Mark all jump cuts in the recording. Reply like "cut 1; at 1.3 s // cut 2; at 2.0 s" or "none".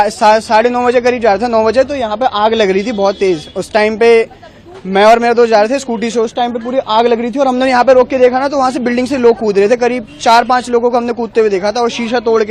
none